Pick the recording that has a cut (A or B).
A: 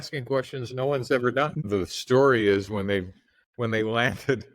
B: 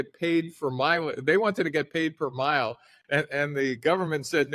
A